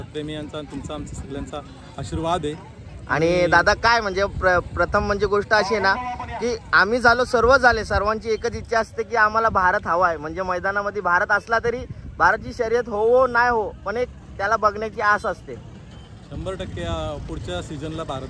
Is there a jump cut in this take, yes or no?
no